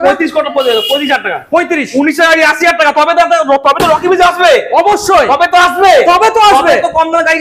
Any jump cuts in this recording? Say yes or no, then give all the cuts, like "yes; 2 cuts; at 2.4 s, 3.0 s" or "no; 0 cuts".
no; 0 cuts